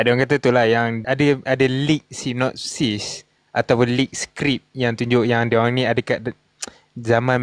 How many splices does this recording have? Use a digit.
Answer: 1